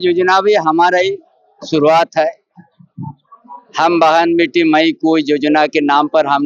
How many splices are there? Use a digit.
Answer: 0